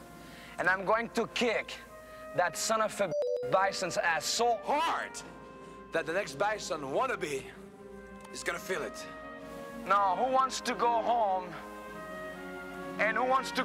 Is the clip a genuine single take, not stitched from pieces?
yes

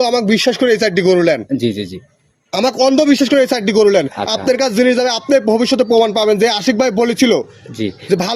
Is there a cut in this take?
no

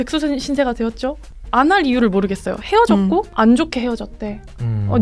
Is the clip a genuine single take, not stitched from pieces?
no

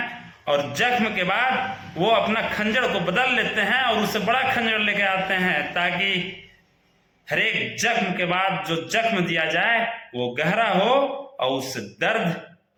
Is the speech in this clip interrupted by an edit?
no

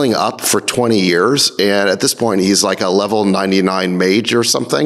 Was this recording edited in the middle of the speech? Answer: no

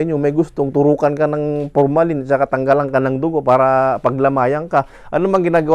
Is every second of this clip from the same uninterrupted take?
yes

